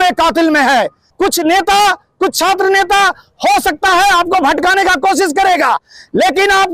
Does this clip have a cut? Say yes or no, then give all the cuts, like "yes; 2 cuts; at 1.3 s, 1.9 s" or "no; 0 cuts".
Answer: yes; 1 cut; at 1.0 s